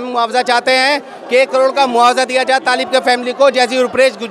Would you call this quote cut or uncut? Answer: uncut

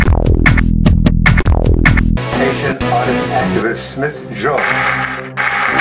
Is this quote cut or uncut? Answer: uncut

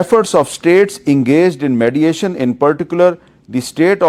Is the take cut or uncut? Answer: uncut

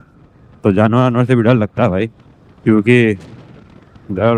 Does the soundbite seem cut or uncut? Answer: uncut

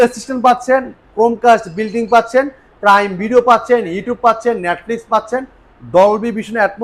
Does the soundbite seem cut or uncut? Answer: uncut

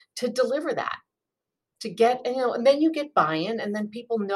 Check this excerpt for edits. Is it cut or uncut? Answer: uncut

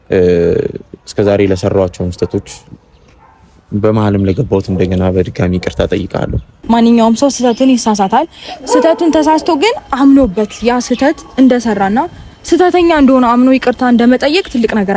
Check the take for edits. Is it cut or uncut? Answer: cut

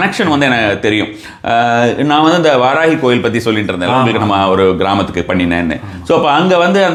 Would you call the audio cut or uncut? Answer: uncut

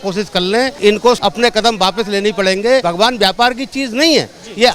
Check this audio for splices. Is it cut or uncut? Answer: cut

